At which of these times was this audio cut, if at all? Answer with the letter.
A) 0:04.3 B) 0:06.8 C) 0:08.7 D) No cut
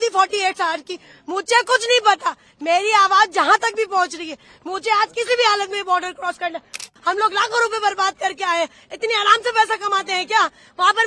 B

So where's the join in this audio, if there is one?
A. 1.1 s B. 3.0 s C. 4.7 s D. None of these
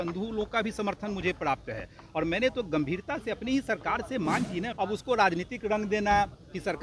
C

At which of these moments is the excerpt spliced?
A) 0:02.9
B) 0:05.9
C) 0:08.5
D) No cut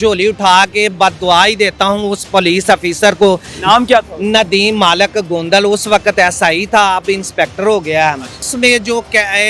C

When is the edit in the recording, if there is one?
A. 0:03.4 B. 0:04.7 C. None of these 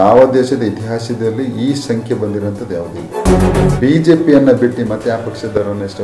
A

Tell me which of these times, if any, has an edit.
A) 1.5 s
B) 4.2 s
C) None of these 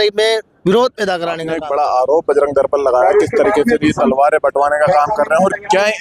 A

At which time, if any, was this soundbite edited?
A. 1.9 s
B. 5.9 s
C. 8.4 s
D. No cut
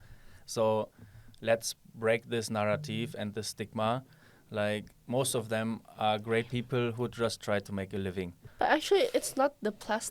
C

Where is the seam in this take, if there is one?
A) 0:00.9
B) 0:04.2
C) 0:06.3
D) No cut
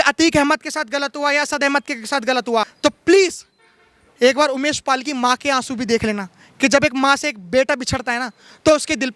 D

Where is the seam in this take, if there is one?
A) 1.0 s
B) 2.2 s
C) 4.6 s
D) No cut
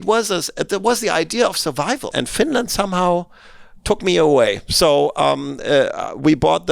B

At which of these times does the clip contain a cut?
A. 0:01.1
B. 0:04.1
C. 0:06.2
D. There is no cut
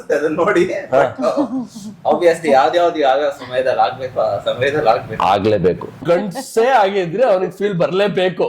C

